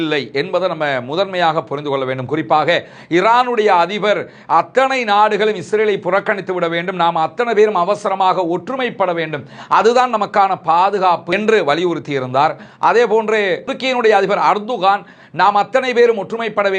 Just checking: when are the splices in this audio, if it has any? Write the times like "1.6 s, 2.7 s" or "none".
none